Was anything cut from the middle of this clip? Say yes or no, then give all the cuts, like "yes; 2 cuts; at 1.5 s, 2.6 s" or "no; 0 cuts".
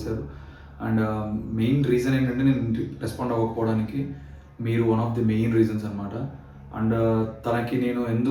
no; 0 cuts